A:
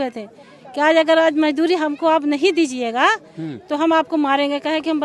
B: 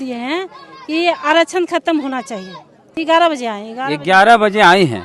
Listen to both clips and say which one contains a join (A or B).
B